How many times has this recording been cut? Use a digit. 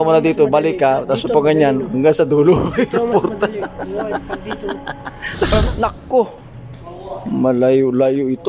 1